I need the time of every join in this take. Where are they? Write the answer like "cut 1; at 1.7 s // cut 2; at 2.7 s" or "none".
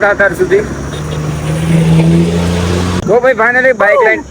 cut 1; at 3.0 s